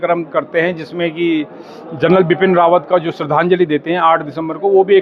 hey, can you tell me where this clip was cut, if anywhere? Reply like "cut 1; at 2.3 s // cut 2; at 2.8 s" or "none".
none